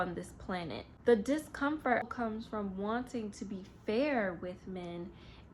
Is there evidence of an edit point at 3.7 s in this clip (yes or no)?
no